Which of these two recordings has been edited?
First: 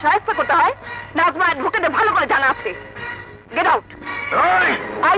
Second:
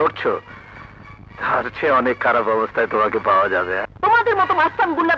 second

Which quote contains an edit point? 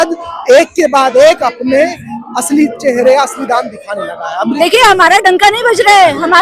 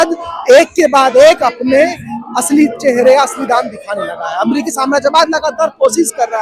first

